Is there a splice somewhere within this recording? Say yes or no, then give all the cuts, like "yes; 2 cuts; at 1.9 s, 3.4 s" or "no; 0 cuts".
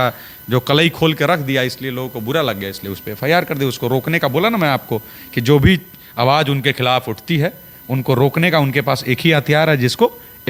no; 0 cuts